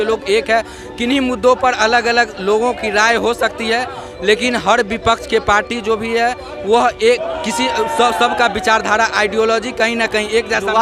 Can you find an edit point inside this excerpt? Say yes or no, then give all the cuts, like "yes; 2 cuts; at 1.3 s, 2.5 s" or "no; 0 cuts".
no; 0 cuts